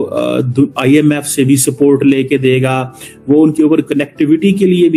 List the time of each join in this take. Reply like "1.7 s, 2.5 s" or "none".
none

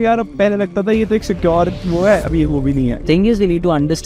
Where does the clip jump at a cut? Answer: 3.0 s

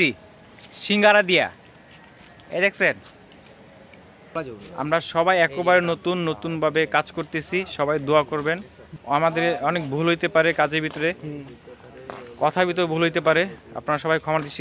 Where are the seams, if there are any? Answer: 4.3 s, 8.9 s

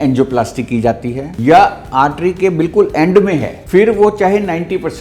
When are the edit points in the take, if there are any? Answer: 1.3 s, 3.6 s

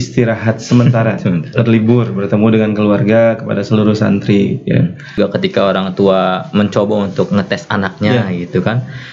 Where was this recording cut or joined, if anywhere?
5.2 s

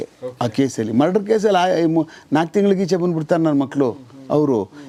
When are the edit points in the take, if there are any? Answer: none

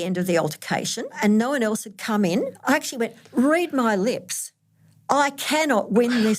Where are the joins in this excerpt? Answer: 1.2 s, 2.5 s

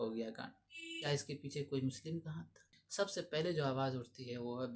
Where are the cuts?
2.8 s

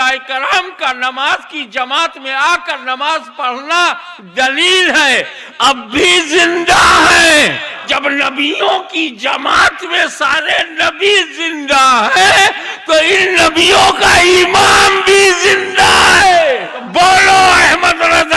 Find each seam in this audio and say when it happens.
7.9 s, 16.8 s

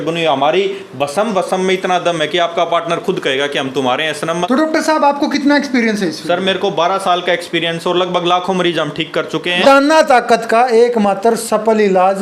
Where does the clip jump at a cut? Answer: 4.5 s, 9.6 s

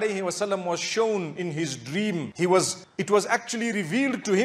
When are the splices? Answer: none

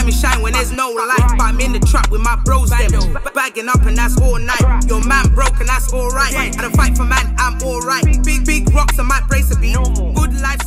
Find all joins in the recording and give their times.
none

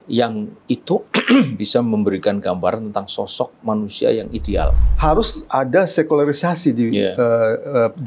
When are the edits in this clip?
4.8 s

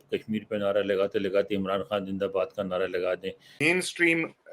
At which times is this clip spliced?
3.6 s

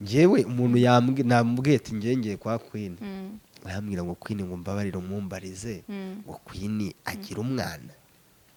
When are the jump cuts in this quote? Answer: none

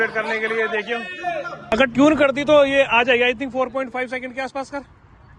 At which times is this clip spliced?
1.6 s

